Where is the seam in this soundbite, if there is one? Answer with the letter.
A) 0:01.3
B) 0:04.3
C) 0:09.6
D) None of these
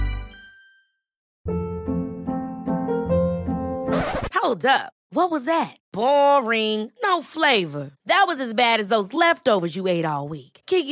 A